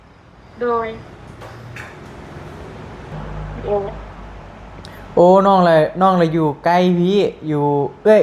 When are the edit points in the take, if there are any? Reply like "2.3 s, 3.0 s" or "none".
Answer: 3.1 s